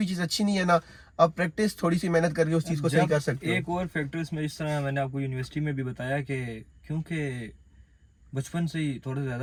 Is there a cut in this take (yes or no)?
no